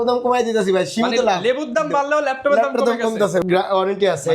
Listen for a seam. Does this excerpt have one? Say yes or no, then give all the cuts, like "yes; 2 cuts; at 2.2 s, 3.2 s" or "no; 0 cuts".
yes; 1 cut; at 3.4 s